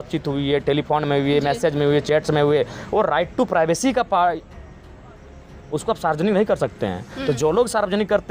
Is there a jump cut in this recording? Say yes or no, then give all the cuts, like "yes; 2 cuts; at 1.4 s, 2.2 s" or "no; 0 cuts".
no; 0 cuts